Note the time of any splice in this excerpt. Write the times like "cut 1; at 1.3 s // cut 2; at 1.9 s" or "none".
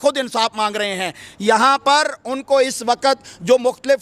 none